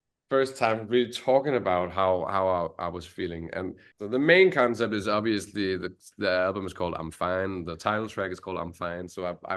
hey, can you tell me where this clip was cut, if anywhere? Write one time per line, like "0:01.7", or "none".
0:03.9